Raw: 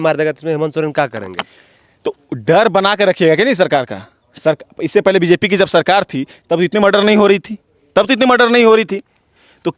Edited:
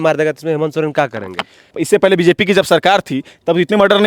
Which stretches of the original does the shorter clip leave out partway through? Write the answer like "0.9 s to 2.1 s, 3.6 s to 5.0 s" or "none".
1.6 s to 4.7 s